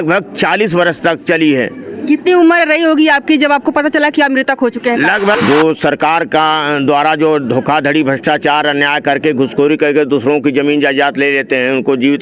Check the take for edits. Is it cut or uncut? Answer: cut